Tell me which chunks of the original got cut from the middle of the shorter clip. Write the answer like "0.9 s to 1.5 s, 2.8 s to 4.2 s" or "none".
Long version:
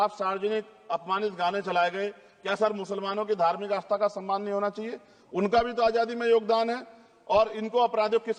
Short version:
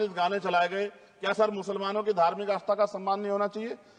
none